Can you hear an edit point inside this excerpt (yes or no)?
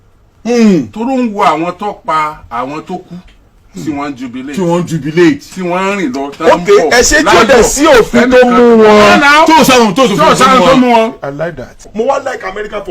yes